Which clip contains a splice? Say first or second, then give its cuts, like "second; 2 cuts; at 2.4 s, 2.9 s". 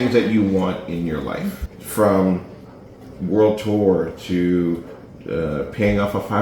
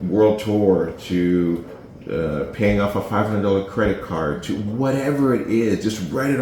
first; 1 cut; at 1.6 s